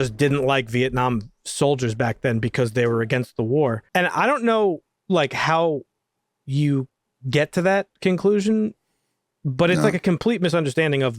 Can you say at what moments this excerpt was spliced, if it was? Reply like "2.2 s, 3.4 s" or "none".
3.8 s